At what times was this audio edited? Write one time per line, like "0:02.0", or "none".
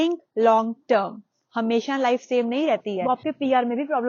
0:03.0